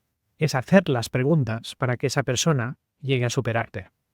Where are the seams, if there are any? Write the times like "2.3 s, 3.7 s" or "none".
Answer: none

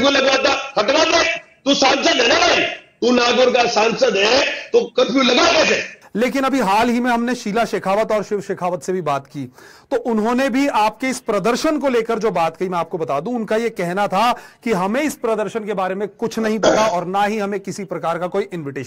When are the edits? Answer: 5.9 s

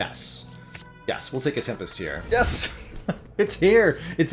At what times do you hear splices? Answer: 2.2 s

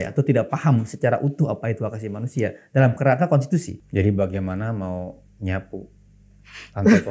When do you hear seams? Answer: 3.8 s

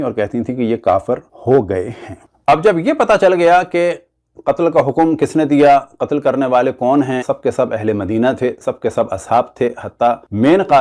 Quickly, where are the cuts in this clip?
none

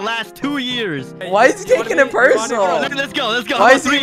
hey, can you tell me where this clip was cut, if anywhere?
1.2 s, 3.0 s

